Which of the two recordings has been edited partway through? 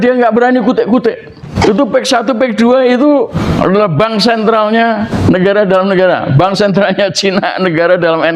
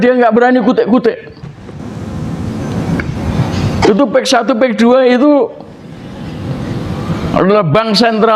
first; 3 cuts; at 1.5 s, 3.4 s, 5.1 s

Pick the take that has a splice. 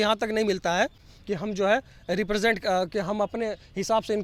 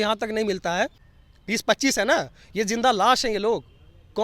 second; 1 cut; at 1.1 s

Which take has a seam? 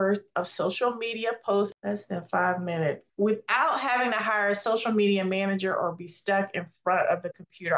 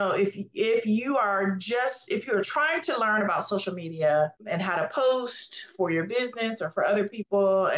first; 2 cuts; at 1.7 s, 3.0 s

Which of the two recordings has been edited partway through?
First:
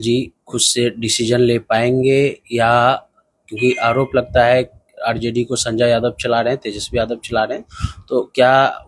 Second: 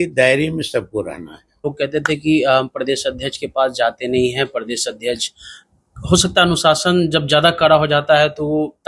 second; 1 cut; at 1.6 s

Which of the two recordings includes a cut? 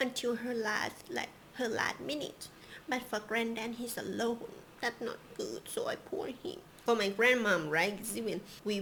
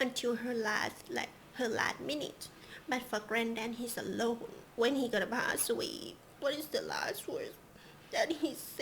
second; 1 cut; at 4.6 s

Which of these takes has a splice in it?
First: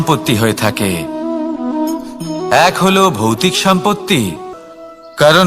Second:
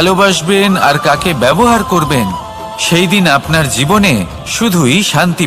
first; 1 cut; at 4.5 s

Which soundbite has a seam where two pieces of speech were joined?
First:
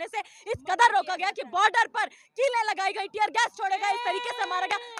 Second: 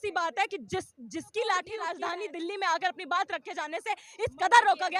second; 1 cut; at 1.9 s

